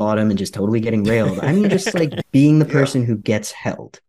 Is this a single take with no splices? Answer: no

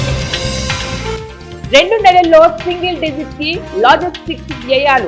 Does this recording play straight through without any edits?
no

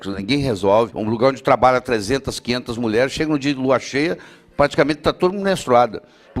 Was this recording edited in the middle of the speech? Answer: yes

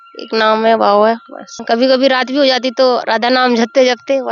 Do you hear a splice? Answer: yes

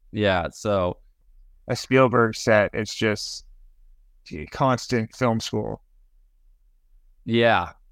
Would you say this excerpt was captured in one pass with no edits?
no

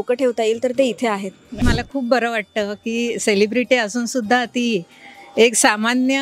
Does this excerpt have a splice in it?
yes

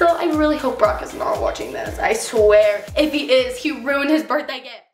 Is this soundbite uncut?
yes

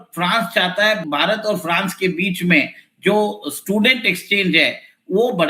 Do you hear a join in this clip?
yes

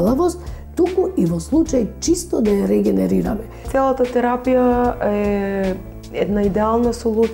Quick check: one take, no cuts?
no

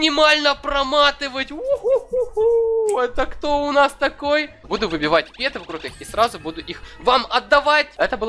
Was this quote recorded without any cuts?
no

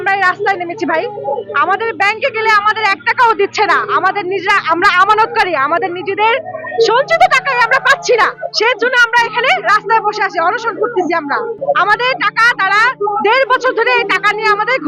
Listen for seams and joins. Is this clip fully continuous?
yes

